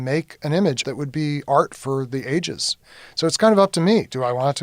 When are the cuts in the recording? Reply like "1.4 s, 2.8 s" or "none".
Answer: 0.8 s, 2.8 s